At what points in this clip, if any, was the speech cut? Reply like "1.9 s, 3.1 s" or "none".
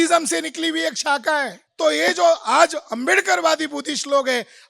1.6 s